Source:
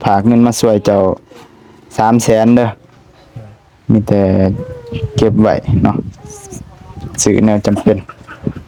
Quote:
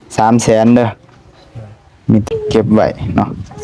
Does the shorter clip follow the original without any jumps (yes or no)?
no